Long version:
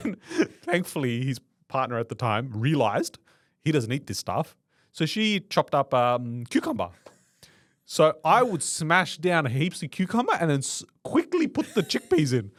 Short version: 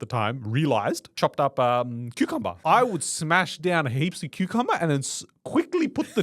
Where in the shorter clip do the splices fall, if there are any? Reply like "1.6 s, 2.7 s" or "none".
1.1 s, 2.6 s